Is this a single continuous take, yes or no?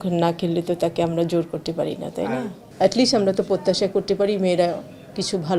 no